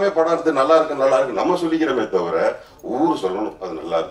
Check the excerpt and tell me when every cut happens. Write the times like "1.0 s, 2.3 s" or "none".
none